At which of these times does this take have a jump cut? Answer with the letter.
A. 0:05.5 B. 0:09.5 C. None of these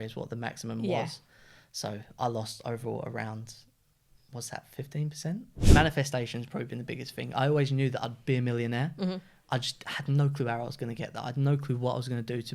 A